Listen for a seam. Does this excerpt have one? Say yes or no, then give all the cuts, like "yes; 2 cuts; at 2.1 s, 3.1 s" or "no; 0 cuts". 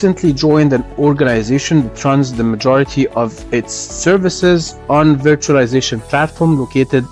no; 0 cuts